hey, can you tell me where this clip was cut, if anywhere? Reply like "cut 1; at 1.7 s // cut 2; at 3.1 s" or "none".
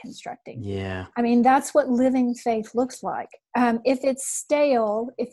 cut 1; at 3.3 s